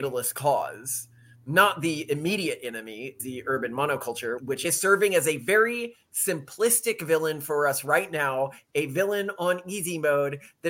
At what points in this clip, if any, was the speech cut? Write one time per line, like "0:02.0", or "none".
0:03.2
0:04.5